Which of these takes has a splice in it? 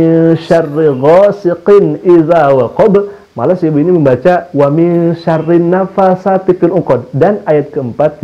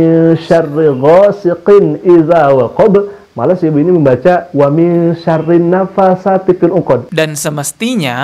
second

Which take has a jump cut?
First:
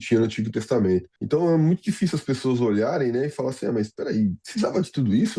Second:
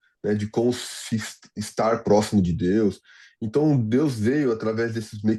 first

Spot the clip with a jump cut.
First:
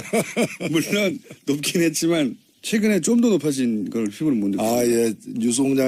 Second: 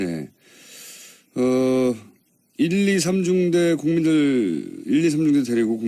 second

